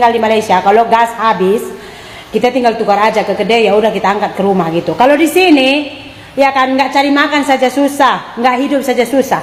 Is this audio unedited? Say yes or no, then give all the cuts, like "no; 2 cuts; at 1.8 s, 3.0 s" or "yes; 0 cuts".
yes; 0 cuts